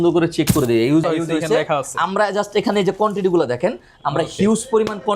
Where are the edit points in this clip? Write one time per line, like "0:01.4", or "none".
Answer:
0:01.1